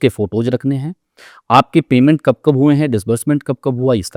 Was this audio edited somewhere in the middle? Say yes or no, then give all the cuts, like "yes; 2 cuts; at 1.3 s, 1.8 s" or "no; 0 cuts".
no; 0 cuts